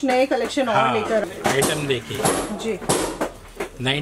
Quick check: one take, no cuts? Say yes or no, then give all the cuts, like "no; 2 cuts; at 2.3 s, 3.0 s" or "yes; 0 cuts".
no; 1 cut; at 1.2 s